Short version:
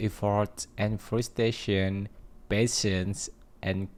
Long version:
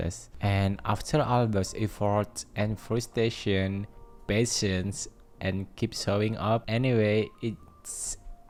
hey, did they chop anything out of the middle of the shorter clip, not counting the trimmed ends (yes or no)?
no